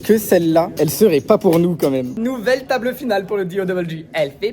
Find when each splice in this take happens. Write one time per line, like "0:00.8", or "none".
0:02.1